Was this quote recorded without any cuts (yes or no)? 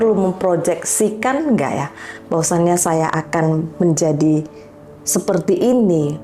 yes